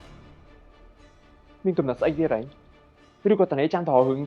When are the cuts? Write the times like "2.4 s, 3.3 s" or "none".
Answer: 1.6 s